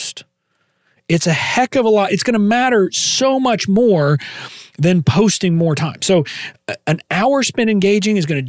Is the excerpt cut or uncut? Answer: uncut